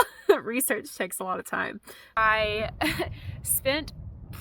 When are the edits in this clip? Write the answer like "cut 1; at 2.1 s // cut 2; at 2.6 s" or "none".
cut 1; at 2.2 s